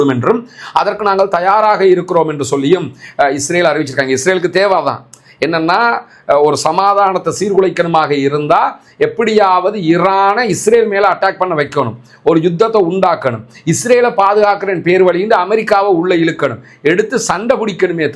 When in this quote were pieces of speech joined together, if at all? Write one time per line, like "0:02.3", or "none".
none